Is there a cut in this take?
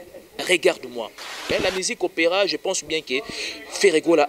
yes; 1 cut; at 1.4 s

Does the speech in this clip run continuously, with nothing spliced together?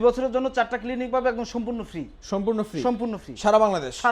yes; 0 cuts

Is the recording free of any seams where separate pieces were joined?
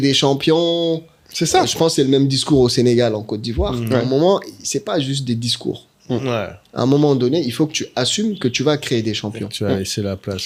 yes; 0 cuts

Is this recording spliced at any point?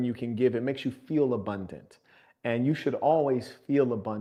no; 0 cuts

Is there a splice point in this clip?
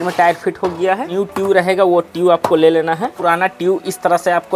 yes; 2 cuts; at 1.1 s, 3.1 s

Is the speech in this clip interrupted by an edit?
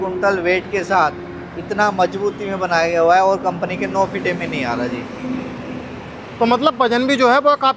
no; 0 cuts

